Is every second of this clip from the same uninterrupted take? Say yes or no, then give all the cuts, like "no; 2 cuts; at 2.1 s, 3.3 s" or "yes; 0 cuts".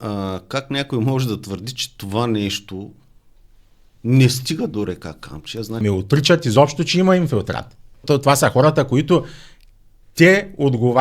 no; 2 cuts; at 5.8 s, 8.0 s